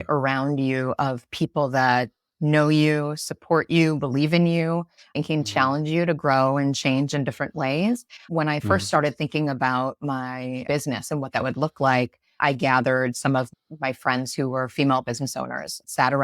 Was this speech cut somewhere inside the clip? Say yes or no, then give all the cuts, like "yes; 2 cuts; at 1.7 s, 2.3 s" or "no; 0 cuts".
yes; 2 cuts; at 10.6 s, 13.5 s